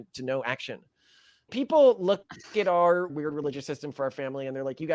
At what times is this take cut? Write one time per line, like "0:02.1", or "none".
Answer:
0:01.5
0:03.1